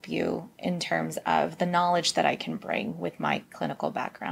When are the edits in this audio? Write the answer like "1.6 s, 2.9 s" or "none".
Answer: none

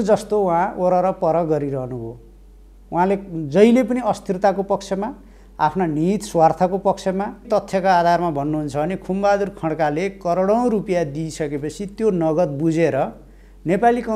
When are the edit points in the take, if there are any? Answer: 7.4 s

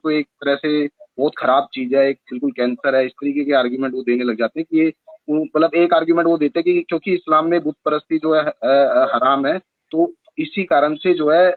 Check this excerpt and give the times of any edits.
none

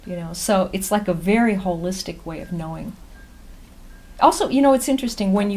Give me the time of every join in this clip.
3.4 s

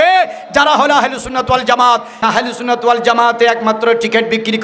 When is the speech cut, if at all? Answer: 2.2 s

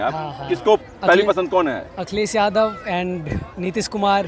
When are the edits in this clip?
none

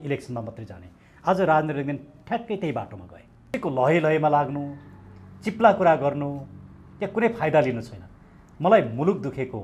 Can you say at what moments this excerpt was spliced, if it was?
3.6 s

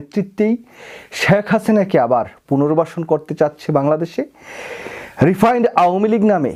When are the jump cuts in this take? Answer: none

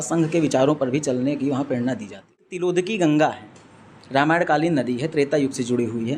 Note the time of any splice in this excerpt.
2.5 s

